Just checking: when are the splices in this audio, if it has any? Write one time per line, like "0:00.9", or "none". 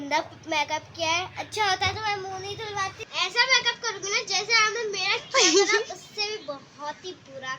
0:03.0